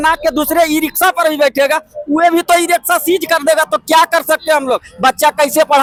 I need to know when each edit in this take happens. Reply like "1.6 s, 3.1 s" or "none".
none